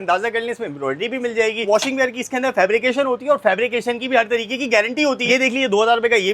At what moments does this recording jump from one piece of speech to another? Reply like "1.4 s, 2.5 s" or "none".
1.6 s, 5.2 s